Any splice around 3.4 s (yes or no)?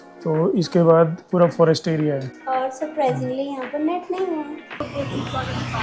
no